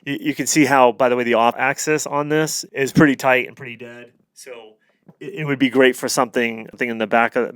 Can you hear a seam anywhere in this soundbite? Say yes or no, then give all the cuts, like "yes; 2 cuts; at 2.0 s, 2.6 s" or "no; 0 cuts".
yes; 3 cuts; at 1.5 s, 2.6 s, 6.8 s